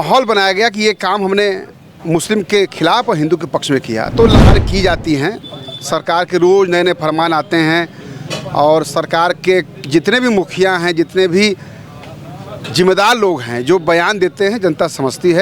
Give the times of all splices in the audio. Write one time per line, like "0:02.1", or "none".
0:04.4